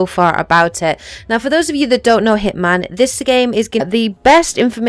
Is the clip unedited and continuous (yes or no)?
yes